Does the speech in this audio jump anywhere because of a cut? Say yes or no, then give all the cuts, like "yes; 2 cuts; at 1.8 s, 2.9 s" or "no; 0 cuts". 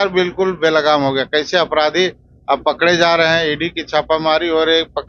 no; 0 cuts